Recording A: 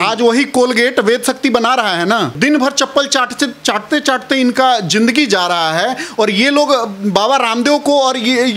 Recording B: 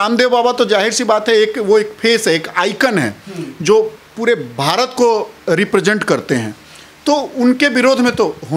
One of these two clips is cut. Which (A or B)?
A